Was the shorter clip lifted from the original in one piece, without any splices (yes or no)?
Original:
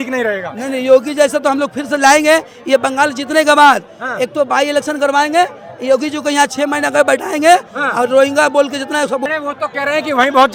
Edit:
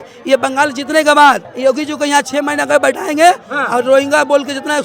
no